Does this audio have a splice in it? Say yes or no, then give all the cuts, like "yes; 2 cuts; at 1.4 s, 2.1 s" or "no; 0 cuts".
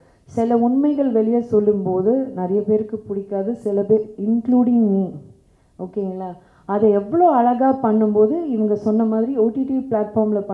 no; 0 cuts